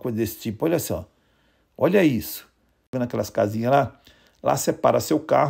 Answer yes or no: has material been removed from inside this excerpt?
yes